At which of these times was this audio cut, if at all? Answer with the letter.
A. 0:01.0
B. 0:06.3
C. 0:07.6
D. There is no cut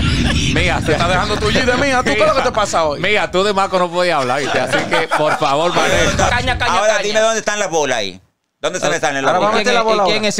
B